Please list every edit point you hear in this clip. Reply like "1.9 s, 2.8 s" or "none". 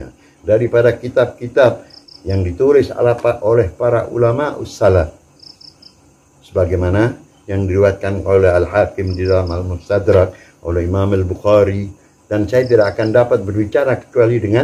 none